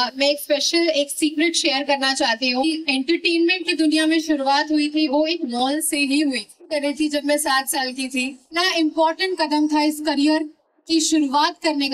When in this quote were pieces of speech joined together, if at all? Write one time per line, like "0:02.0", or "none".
0:02.6
0:06.7
0:08.6

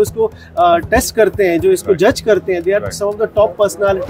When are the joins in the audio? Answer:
none

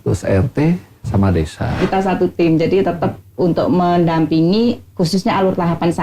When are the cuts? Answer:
0:01.8

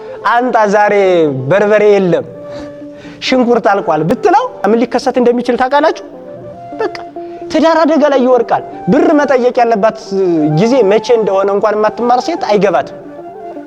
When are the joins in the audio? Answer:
0:04.7

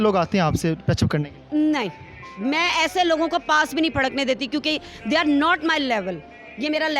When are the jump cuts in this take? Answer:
none

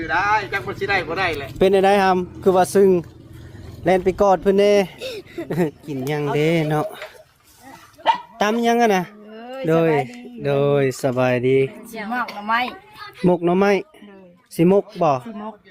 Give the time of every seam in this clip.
0:06.1

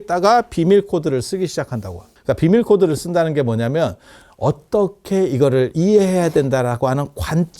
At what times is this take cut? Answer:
0:02.0

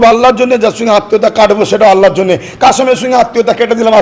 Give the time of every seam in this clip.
none

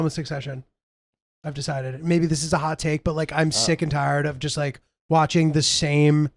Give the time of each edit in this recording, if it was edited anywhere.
none

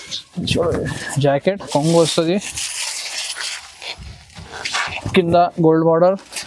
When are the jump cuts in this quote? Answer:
0:01.7

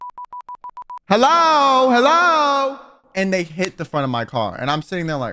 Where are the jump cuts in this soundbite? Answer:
0:01.0
0:03.0

